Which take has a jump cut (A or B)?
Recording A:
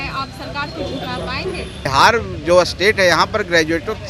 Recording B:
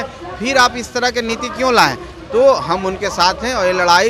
A